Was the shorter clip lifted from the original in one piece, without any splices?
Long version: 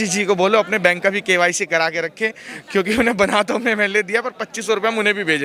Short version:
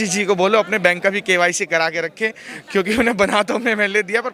yes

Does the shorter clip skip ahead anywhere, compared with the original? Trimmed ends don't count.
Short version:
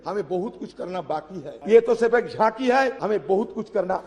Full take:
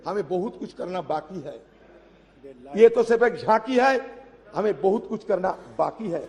yes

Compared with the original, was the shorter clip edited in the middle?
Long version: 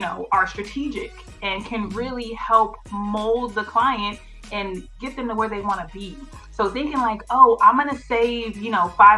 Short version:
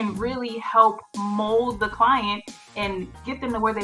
no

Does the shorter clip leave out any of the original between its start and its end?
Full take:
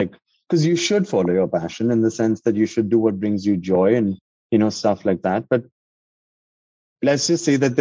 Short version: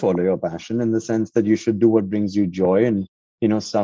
no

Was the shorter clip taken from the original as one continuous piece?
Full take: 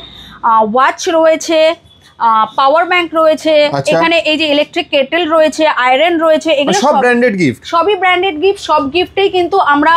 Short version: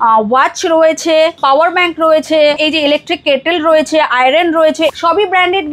no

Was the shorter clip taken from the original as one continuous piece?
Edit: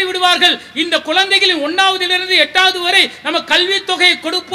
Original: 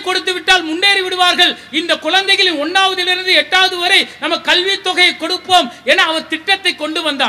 yes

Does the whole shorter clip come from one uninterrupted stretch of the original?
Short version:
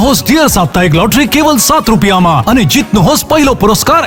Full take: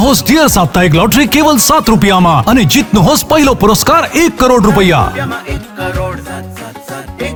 yes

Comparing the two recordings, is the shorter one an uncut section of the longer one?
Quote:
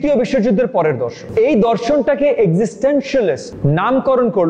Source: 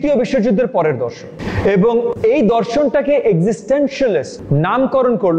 no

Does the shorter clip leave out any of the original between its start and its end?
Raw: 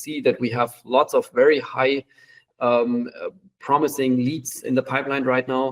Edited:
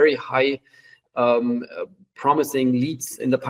no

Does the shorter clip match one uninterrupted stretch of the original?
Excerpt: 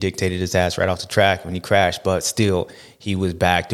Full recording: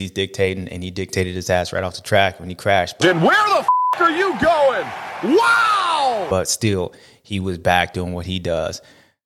no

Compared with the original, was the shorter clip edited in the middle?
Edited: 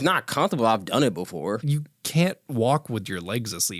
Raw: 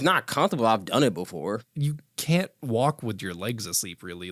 yes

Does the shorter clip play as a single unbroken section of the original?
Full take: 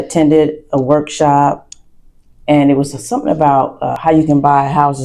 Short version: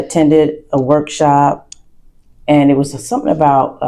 yes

